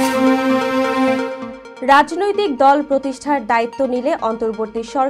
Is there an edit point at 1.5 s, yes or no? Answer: yes